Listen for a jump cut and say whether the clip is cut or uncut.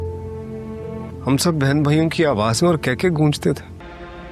uncut